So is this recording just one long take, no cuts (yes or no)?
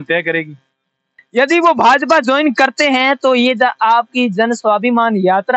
no